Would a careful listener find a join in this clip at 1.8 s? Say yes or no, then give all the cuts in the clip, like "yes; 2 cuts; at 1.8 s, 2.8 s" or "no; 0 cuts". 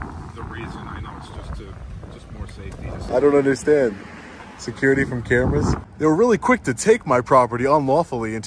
no; 2 cuts; at 3.0 s, 5.9 s